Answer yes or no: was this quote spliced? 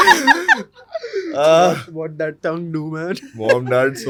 no